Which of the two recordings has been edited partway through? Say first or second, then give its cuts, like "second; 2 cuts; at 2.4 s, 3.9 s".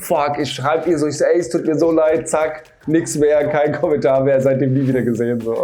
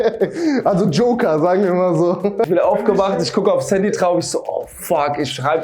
second; 1 cut; at 2.5 s